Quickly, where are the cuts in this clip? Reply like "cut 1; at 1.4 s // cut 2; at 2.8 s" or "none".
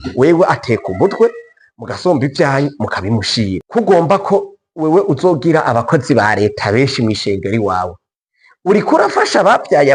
cut 1; at 3.6 s